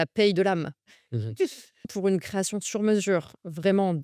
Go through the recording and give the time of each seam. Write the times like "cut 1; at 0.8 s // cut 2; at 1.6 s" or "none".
cut 1; at 1.9 s